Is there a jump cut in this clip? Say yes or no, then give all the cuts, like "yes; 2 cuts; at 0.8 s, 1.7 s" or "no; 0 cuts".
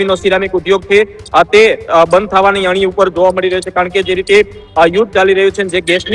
no; 0 cuts